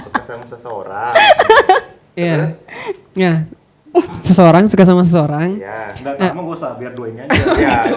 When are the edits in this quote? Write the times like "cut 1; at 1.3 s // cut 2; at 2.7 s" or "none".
none